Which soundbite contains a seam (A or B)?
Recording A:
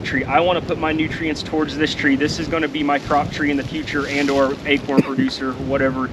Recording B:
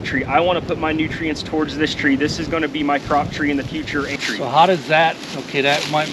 B